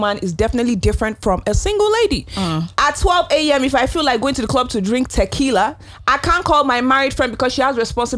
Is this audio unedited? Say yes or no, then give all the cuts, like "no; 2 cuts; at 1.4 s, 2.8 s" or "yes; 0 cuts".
yes; 0 cuts